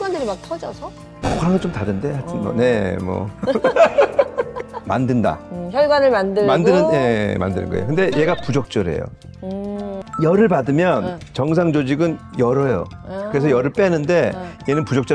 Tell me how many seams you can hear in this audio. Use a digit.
2